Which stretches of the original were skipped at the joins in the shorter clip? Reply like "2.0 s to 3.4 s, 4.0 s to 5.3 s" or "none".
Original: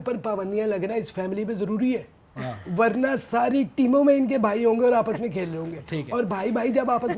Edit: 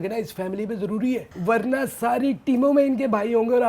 2.1 s to 2.6 s